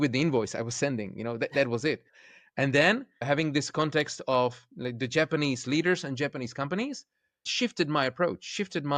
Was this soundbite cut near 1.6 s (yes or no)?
no